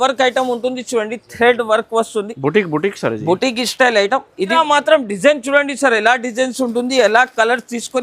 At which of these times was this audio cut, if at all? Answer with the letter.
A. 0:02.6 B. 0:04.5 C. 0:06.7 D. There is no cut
B